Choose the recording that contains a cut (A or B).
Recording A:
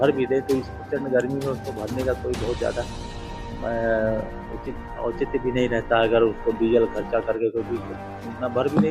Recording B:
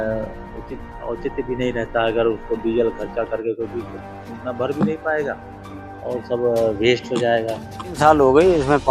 B